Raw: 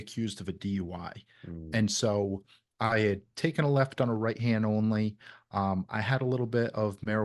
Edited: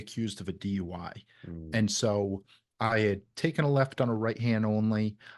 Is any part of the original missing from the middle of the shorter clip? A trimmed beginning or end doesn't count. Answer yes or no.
no